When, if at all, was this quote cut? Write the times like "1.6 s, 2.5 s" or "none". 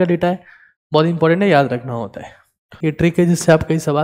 2.7 s